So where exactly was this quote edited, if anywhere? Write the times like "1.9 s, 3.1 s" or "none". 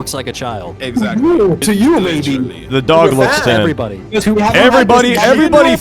1.6 s